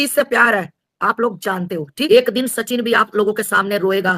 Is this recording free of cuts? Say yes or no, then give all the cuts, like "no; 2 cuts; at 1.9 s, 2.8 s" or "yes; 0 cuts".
no; 1 cut; at 2.1 s